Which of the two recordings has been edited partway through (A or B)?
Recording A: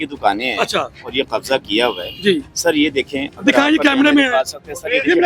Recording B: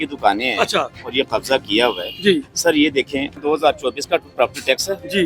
B